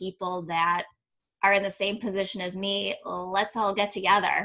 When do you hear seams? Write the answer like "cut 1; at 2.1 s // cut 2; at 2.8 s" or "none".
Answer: none